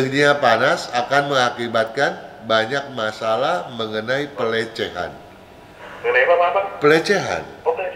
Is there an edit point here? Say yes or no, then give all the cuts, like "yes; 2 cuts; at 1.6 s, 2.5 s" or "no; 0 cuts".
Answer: no; 0 cuts